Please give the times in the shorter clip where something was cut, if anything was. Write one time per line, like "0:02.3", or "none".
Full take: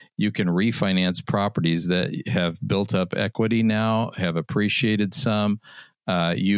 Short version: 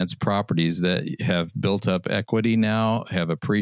none